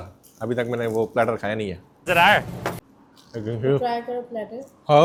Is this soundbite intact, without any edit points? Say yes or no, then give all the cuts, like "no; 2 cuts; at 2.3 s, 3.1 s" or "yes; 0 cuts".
yes; 0 cuts